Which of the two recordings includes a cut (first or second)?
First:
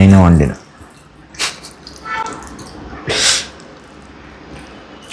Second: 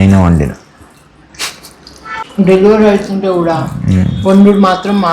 second